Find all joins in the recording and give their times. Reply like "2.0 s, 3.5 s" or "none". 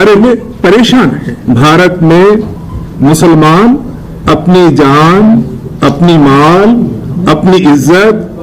1.3 s